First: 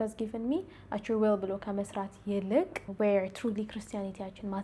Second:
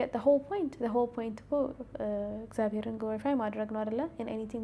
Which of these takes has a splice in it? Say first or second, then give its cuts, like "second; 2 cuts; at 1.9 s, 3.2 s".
first; 1 cut; at 2.8 s